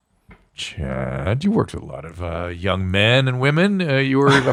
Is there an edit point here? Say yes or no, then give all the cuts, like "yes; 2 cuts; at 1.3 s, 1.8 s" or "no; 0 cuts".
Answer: no; 0 cuts